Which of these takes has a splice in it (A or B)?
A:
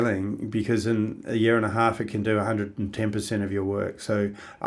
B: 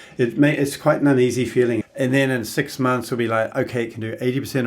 B